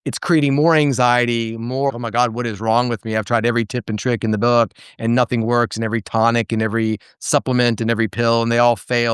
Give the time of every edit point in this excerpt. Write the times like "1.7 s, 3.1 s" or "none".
none

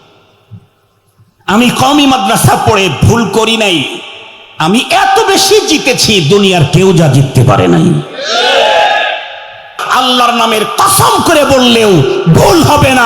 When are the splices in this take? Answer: 9.8 s

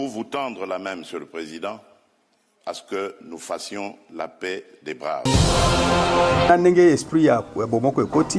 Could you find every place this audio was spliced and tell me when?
5.3 s, 6.5 s

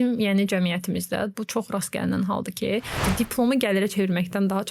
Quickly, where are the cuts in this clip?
3.0 s

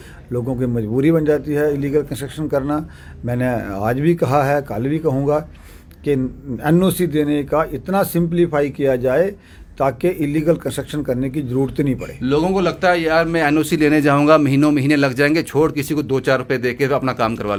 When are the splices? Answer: none

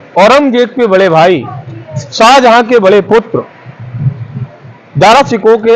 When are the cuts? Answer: none

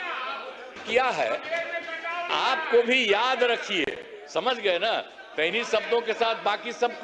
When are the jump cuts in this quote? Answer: 0.8 s, 2.3 s

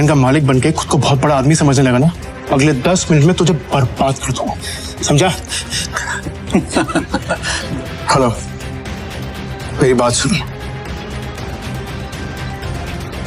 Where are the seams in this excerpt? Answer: 2.3 s, 7.5 s, 11.4 s

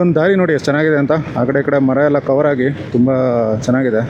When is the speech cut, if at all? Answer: 2.8 s

